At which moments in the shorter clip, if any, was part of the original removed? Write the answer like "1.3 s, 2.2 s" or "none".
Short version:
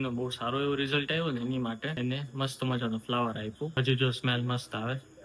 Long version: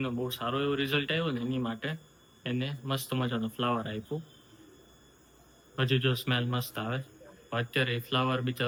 1.9 s, 3.7 s